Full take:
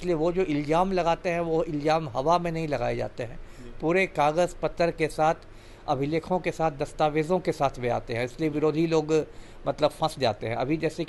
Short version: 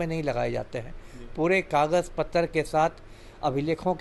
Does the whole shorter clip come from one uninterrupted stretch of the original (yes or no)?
yes